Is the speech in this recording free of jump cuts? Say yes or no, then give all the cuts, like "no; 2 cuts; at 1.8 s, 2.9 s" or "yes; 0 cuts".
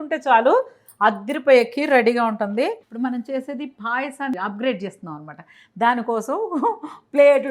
no; 1 cut; at 2.8 s